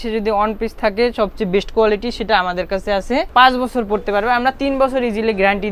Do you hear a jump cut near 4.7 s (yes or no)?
no